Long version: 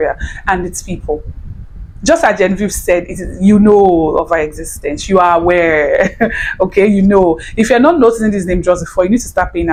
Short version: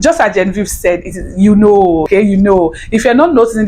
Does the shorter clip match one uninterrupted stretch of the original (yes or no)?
no